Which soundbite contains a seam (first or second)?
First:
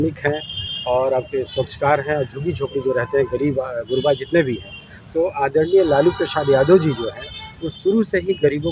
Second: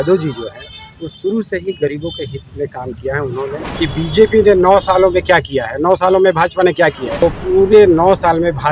second